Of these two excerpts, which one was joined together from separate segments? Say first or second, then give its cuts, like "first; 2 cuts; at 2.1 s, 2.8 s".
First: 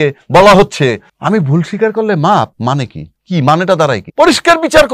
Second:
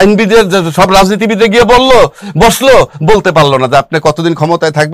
first; 3 cuts; at 1.1 s, 2.5 s, 4.0 s